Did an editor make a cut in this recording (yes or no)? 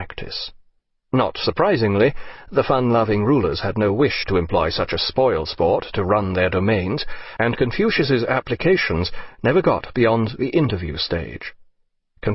yes